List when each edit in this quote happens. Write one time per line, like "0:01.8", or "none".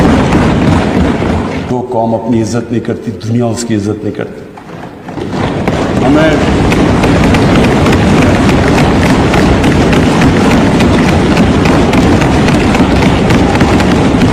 0:01.7